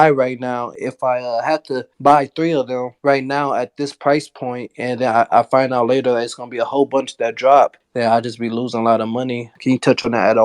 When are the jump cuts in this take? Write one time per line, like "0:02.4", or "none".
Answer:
0:09.5

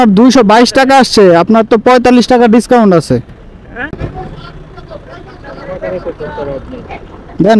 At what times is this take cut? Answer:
0:03.6

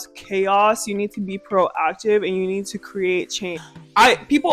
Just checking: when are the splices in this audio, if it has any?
0:03.6

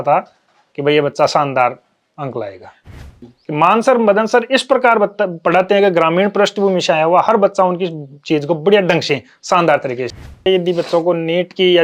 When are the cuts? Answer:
0:02.9
0:10.5

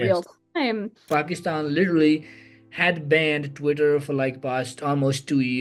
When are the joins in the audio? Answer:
0:01.0

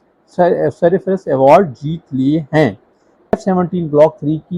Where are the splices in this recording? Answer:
0:01.4
0:03.3

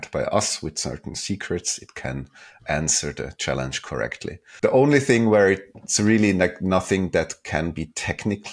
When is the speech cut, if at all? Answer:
0:04.4

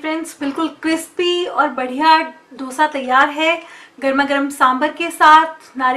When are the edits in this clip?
none

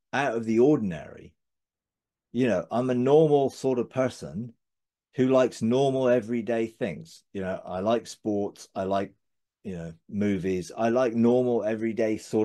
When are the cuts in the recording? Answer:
none

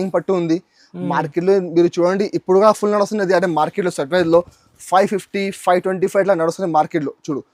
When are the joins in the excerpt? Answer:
none

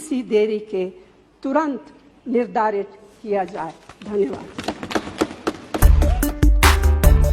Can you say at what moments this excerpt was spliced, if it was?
none

